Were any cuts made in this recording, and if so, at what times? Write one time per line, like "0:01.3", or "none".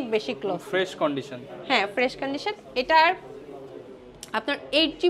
none